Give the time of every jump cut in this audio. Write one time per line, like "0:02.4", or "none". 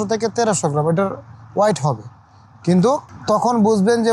0:03.1